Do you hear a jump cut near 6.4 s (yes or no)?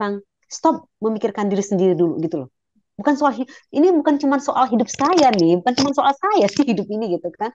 no